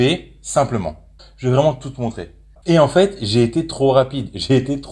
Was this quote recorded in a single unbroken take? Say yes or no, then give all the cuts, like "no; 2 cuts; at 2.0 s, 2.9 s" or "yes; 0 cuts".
no; 2 cuts; at 1.2 s, 2.6 s